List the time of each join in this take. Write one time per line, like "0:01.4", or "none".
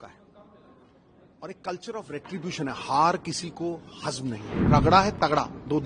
0:04.6